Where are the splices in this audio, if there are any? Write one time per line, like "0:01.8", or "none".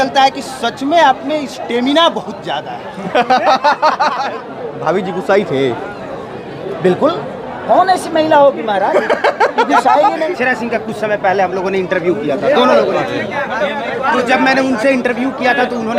0:04.4
0:10.4